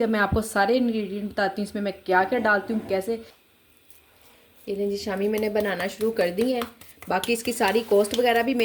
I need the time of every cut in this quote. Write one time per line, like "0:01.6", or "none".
0:03.4